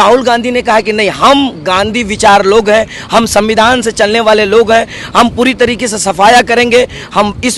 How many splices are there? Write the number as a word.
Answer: zero